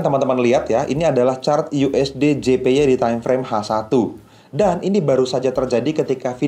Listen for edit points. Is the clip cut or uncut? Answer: uncut